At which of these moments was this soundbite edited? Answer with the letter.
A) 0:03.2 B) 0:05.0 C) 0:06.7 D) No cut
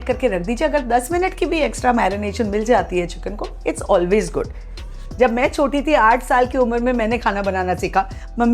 B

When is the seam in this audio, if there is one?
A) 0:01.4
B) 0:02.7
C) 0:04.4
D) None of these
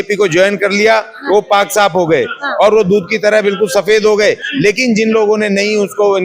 D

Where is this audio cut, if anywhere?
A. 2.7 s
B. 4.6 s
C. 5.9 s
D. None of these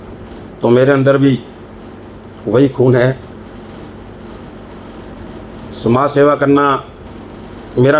D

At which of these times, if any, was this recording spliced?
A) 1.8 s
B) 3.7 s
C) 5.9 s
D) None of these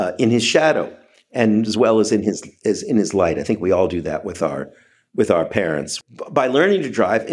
C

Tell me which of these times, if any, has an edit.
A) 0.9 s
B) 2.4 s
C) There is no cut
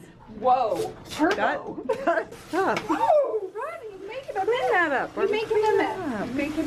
B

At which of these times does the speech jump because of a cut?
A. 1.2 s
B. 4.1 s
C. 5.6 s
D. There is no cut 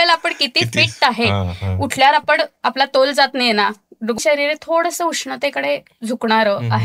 B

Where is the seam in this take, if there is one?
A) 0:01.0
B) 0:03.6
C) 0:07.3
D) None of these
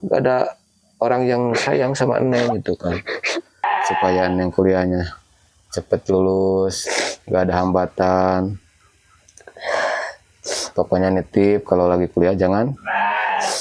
B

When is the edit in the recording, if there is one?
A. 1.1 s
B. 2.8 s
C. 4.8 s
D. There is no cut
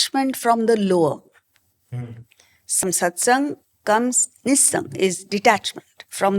B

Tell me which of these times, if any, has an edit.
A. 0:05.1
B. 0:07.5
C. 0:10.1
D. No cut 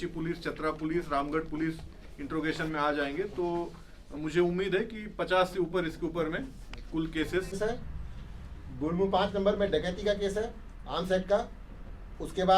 B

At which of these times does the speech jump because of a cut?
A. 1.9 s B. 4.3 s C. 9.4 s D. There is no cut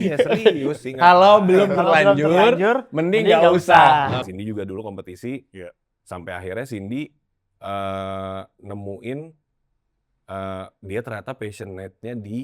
B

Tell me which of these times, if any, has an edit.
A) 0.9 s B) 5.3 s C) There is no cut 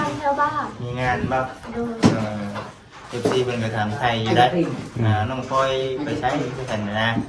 C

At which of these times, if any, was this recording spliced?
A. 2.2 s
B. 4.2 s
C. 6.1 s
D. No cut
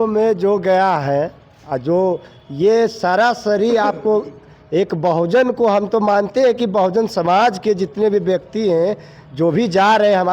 D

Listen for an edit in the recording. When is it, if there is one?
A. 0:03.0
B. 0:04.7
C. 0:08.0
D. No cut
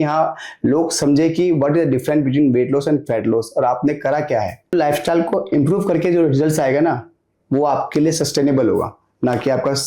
B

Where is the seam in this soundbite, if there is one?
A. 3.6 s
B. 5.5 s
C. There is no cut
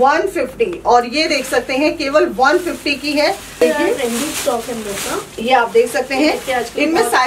A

